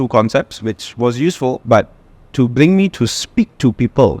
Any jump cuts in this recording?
yes; 1 cut; at 1.6 s

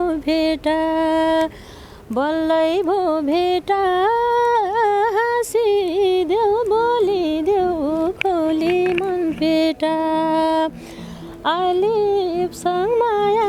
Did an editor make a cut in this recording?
no; 0 cuts

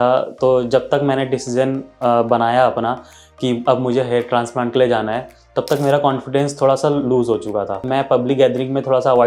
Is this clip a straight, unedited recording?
no; 1 cut; at 7.8 s

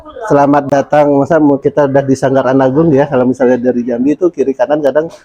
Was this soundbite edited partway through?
no; 0 cuts

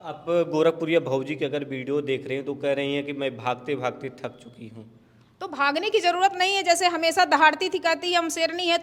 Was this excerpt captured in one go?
yes; 0 cuts

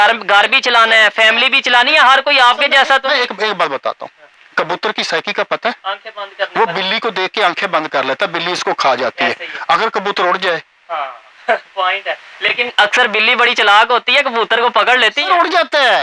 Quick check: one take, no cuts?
yes; 0 cuts

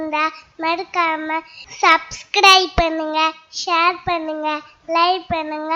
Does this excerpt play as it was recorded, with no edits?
yes; 0 cuts

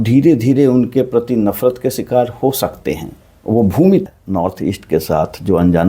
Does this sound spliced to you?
yes; 1 cut; at 4.0 s

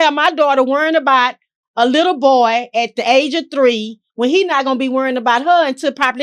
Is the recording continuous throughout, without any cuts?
yes; 0 cuts

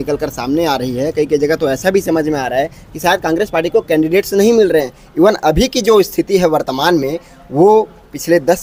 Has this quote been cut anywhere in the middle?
no; 0 cuts

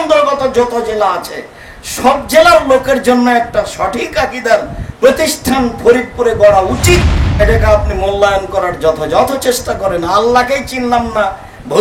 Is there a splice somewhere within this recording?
yes; 1 cut; at 7.2 s

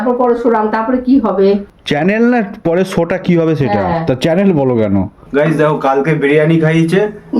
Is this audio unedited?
no; 2 cuts; at 1.7 s, 5.2 s

